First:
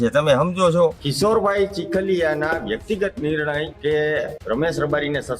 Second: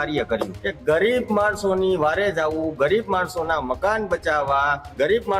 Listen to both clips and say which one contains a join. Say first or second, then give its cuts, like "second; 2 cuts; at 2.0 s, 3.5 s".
first; 1 cut; at 1.0 s